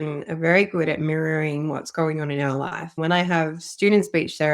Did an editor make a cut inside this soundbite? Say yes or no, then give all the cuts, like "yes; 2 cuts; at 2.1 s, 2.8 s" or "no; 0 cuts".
yes; 1 cut; at 3.0 s